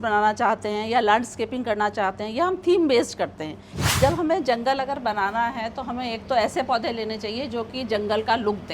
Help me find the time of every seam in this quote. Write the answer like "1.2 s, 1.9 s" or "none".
3.8 s

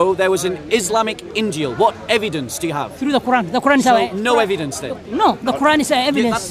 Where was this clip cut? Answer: none

